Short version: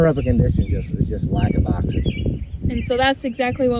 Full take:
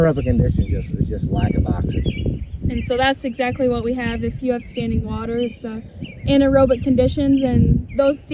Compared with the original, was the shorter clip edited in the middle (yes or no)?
no